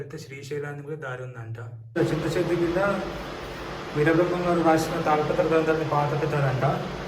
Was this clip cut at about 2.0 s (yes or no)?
yes